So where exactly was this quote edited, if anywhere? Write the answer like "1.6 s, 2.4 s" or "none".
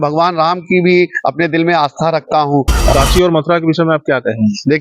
2.9 s